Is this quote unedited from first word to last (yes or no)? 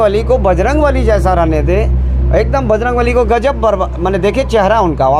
yes